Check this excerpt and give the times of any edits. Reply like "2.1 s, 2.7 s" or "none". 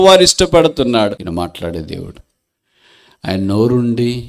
1.2 s